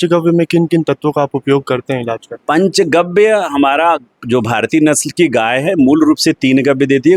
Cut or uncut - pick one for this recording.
uncut